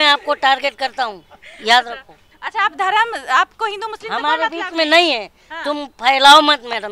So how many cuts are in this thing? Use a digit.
0